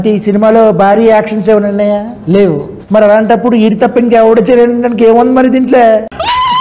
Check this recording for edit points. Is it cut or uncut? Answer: cut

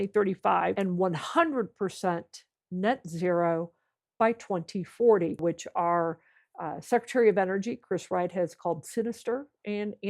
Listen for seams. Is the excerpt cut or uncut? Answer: cut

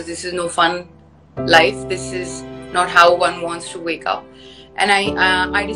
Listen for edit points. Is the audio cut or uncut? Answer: uncut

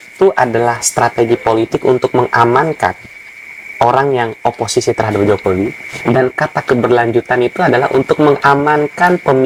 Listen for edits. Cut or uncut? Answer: uncut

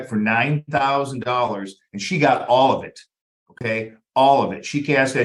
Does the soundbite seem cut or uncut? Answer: uncut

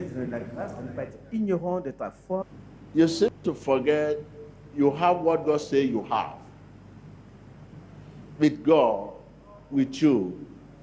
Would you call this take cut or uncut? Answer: uncut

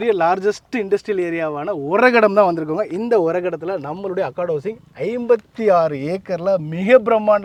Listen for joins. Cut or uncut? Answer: uncut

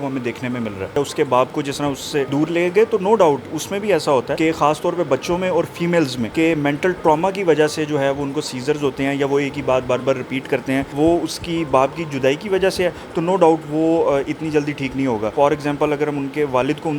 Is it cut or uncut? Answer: cut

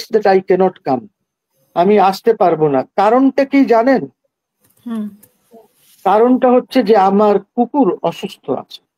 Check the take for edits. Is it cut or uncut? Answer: uncut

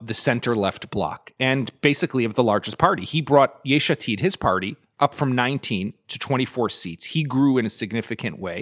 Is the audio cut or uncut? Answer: uncut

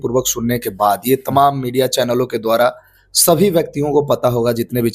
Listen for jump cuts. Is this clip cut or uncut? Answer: uncut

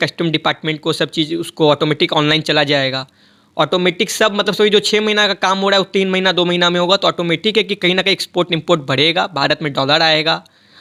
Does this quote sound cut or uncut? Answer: uncut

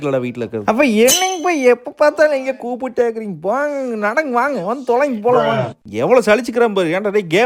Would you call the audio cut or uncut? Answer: uncut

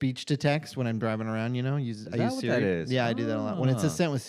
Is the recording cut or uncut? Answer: uncut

